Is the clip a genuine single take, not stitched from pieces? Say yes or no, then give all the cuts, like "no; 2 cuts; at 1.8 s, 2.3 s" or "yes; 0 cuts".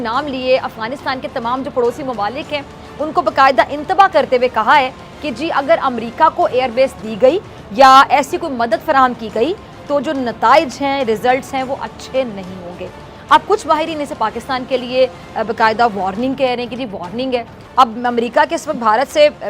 no; 1 cut; at 17.5 s